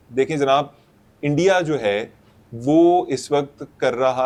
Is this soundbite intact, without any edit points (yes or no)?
yes